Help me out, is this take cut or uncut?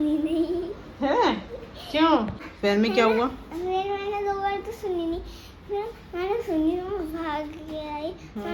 uncut